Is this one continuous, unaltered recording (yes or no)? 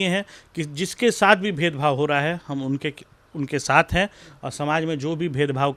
yes